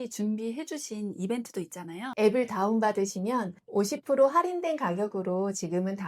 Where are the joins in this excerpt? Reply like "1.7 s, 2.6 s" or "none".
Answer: 2.1 s